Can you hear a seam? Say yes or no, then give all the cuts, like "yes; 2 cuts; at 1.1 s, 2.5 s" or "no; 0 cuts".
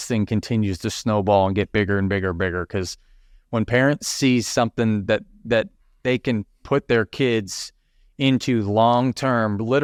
no; 0 cuts